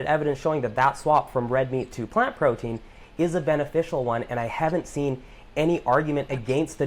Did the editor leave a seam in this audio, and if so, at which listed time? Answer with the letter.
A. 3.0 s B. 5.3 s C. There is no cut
C